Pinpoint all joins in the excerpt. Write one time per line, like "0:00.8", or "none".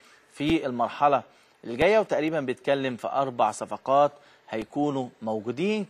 none